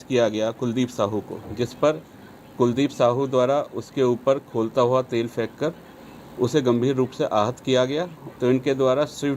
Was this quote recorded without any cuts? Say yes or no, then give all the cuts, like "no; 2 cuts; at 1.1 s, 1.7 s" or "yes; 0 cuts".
no; 1 cut; at 8.2 s